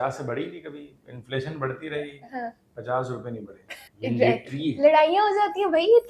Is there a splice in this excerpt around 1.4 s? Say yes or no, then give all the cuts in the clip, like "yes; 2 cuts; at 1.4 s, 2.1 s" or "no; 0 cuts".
no; 1 cut; at 3.8 s